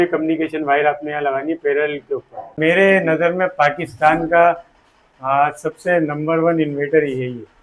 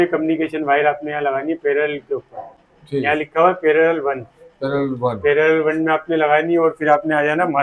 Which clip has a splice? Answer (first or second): first